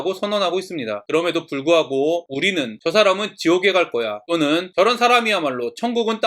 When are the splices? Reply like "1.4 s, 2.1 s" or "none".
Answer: 1.0 s, 2.5 s, 4.4 s